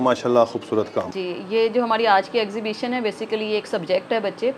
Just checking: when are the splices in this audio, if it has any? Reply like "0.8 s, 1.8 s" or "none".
1.1 s

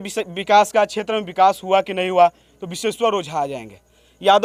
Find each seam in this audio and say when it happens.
none

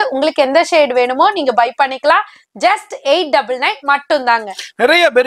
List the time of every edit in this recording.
none

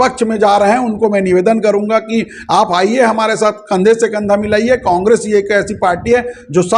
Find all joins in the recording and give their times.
none

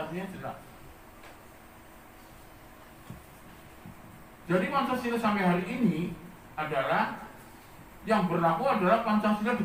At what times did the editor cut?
none

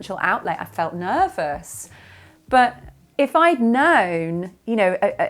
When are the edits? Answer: none

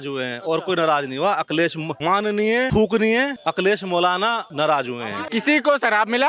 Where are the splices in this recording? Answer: 2.2 s, 3.4 s, 4.5 s, 5.1 s

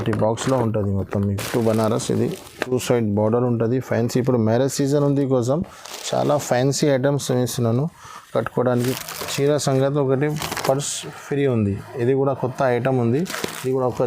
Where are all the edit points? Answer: 1.4 s, 9.0 s

